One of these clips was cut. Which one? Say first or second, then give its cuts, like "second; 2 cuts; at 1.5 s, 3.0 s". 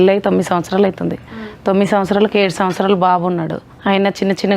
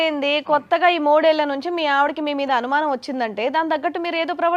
first; 1 cut; at 3.7 s